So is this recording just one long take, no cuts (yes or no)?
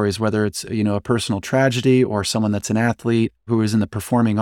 no